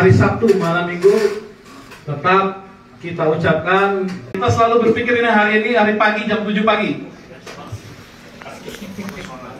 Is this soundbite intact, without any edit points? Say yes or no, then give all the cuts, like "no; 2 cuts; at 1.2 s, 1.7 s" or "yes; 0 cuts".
no; 1 cut; at 4.3 s